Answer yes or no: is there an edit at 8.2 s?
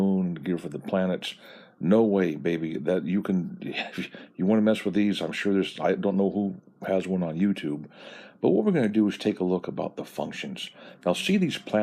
yes